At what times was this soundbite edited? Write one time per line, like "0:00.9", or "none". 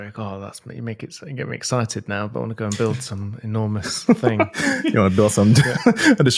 none

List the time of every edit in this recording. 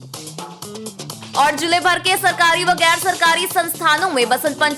0:01.1

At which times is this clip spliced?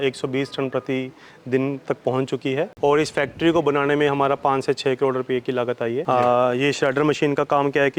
0:02.7
0:06.0

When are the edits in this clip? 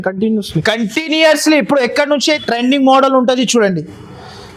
0:02.4

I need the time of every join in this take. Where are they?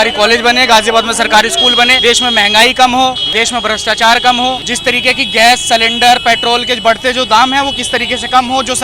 0:02.0
0:03.2
0:04.7

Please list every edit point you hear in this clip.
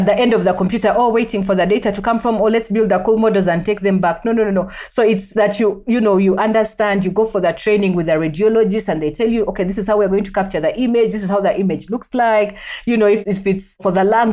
none

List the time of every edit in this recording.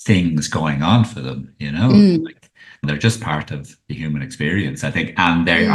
0:02.8

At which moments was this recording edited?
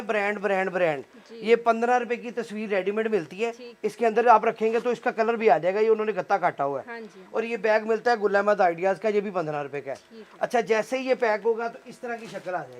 none

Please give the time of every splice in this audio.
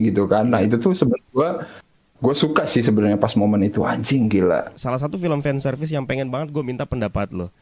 0:04.7

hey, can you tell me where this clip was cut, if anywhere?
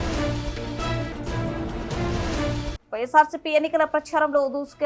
none

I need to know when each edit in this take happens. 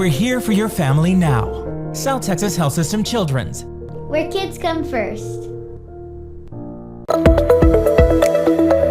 0:07.0

